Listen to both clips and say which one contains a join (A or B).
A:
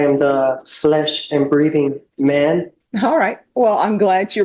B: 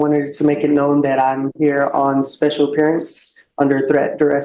A